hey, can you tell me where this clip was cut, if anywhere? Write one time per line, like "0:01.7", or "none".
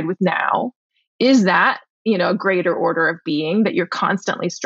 none